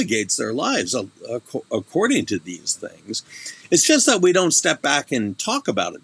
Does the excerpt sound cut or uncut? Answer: uncut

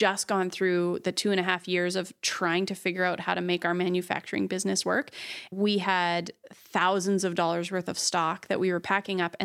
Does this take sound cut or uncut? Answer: cut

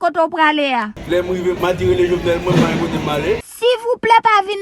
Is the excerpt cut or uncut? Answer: cut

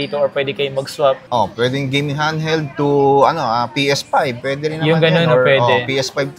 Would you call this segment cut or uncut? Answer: uncut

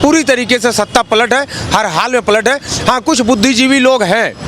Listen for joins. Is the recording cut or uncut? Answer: uncut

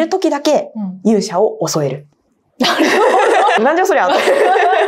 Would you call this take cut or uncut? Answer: cut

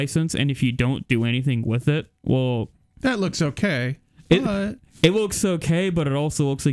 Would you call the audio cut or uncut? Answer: uncut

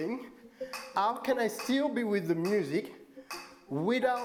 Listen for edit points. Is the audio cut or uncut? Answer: uncut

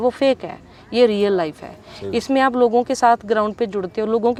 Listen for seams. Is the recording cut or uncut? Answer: uncut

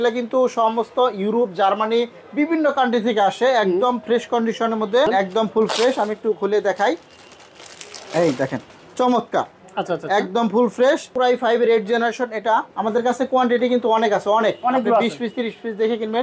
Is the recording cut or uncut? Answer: cut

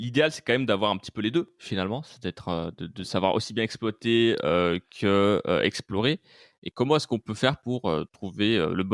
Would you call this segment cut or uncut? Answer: uncut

